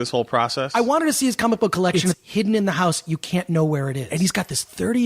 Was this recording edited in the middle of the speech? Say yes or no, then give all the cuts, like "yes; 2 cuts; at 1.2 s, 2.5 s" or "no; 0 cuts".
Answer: yes; 2 cuts; at 2.1 s, 4.0 s